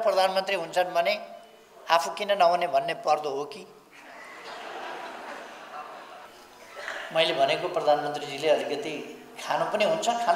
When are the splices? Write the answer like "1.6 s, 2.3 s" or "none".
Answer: 6.2 s

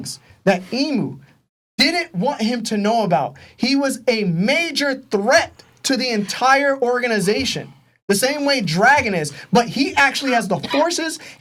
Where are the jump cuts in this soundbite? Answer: none

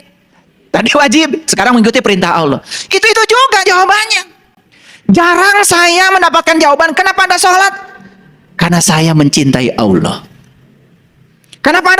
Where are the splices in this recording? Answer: none

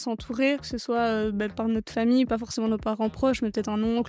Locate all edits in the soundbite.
1.5 s, 2.3 s

